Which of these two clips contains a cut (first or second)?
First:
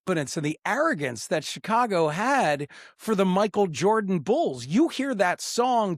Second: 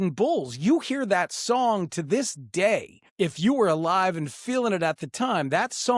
second